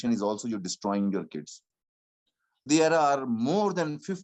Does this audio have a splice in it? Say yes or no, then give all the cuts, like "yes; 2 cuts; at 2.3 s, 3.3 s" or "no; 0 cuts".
yes; 1 cut; at 2.7 s